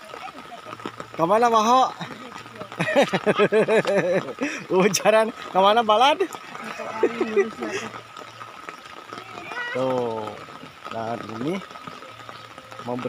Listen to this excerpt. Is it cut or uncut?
uncut